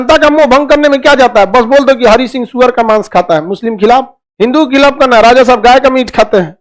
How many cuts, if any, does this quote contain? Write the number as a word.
zero